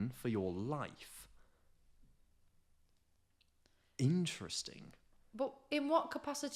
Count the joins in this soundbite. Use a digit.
0